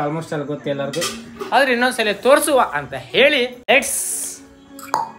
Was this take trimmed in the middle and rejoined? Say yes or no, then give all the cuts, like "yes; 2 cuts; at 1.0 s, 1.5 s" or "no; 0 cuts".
no; 0 cuts